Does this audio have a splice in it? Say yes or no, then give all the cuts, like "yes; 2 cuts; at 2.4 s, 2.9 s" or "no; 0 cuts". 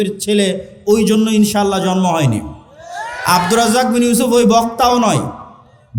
no; 0 cuts